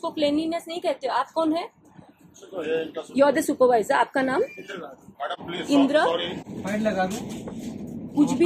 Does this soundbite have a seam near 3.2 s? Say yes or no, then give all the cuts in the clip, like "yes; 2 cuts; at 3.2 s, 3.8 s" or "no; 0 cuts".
no; 1 cut; at 6.4 s